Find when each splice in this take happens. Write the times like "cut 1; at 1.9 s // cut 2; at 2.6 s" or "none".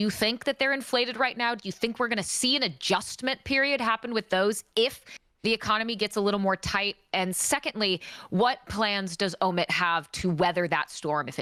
none